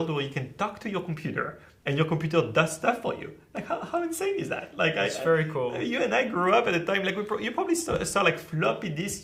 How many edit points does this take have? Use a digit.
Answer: 0